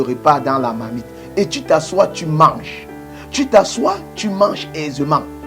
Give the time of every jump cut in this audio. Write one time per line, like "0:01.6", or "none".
none